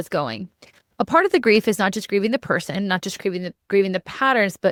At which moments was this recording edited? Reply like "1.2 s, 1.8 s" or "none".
none